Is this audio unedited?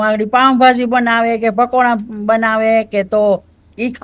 yes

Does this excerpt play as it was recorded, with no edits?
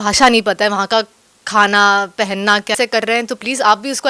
no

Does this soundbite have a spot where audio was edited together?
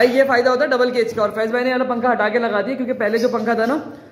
no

